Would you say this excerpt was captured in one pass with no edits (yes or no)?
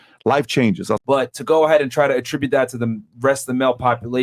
no